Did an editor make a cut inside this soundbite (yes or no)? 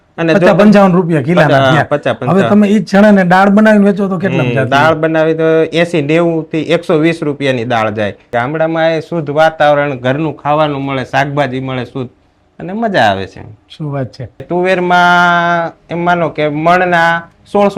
yes